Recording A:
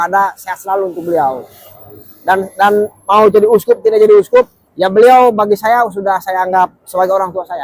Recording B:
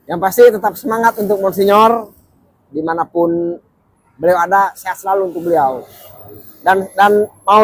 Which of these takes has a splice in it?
A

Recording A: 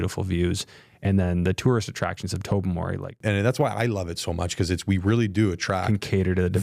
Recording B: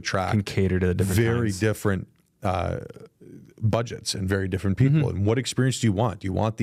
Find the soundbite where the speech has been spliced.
A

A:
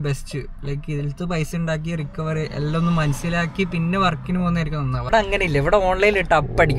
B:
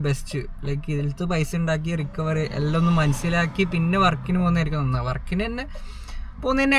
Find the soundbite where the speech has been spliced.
A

